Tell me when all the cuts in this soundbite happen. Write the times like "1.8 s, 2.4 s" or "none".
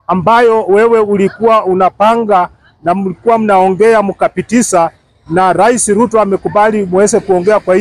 none